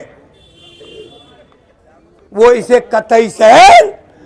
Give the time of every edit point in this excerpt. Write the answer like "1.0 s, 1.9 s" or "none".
none